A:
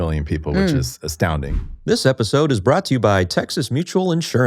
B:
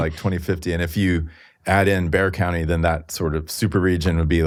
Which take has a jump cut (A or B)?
A